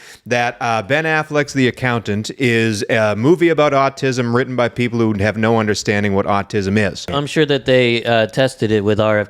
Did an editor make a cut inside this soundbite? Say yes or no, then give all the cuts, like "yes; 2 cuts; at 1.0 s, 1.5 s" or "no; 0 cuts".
yes; 1 cut; at 7.2 s